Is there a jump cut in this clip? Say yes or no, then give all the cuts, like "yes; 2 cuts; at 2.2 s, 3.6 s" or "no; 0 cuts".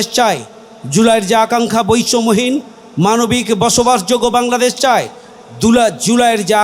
no; 0 cuts